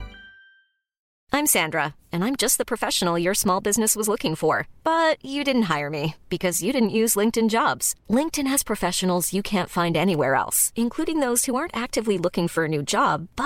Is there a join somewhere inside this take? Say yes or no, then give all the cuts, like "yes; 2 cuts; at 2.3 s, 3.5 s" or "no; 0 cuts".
yes; 1 cut; at 1.1 s